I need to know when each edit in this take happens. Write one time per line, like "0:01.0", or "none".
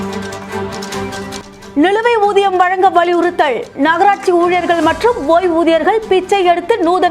0:01.2